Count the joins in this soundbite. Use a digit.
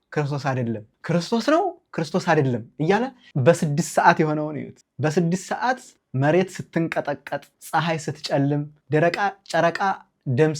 1